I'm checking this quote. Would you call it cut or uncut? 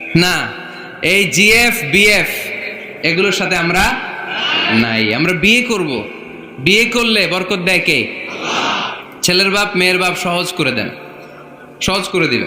uncut